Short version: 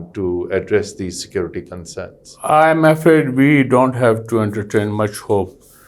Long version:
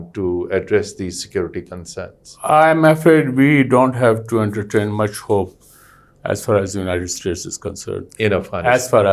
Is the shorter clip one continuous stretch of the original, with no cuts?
yes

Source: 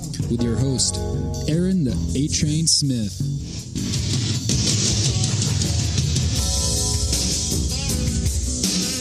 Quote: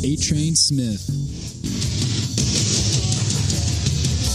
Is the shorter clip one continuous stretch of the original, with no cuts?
yes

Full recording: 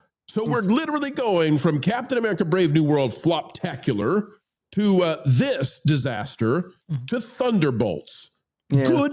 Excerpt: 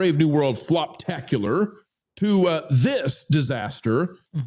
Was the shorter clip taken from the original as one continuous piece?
yes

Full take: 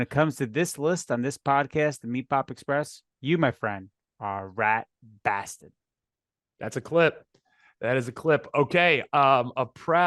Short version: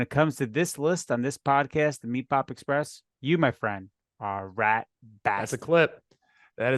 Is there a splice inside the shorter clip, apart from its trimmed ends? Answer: yes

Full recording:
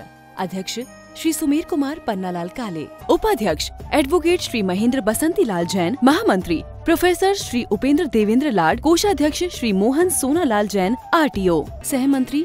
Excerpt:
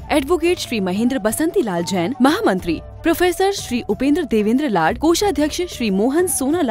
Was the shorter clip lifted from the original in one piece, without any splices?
yes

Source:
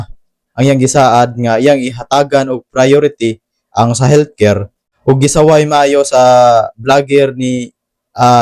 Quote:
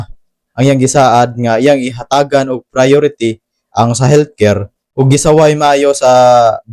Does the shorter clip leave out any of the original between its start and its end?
yes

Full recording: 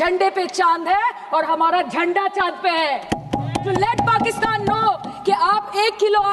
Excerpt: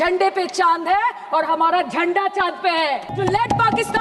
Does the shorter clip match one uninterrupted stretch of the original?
no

